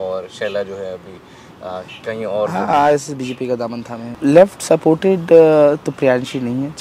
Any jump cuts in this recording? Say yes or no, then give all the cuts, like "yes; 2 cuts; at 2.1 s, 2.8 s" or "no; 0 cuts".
yes; 1 cut; at 4.1 s